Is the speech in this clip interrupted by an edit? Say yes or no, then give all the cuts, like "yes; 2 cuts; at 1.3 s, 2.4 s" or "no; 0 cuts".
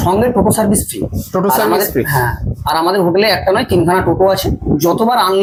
no; 0 cuts